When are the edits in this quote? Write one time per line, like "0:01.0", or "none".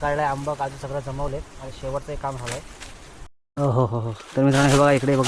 0:03.3